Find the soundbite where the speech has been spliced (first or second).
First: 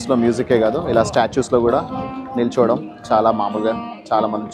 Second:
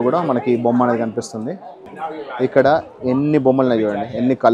second